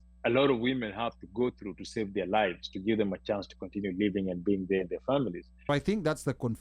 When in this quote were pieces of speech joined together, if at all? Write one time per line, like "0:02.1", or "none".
0:05.6